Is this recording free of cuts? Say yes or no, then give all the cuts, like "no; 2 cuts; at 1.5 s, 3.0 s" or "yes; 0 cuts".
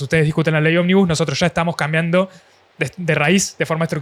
yes; 0 cuts